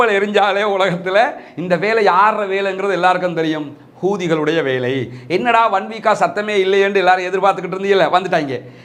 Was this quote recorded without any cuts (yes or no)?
yes